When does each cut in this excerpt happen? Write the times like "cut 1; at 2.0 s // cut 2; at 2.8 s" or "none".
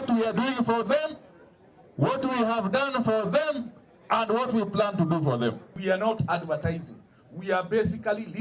none